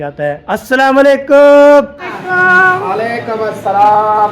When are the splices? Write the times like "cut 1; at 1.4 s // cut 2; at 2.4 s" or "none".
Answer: cut 1; at 2.1 s